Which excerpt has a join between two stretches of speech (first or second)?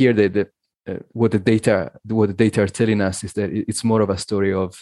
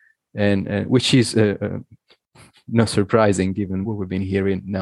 second